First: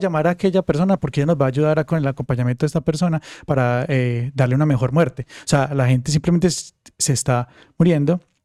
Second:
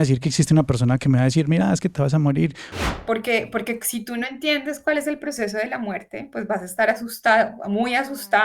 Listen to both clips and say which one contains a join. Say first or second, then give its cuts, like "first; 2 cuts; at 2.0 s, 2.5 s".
second; 1 cut; at 2.7 s